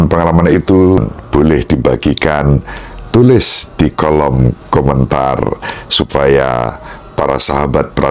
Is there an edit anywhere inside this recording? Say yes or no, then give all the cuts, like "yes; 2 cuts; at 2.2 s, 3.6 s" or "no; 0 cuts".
yes; 1 cut; at 1.0 s